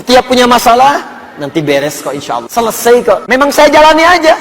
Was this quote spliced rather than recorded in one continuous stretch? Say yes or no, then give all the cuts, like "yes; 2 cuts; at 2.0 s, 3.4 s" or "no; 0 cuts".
yes; 2 cuts; at 2.5 s, 3.2 s